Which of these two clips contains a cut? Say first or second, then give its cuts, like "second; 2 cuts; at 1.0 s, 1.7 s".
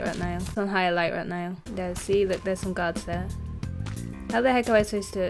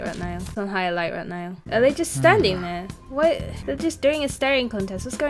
second; 2 cuts; at 1.5 s, 3.5 s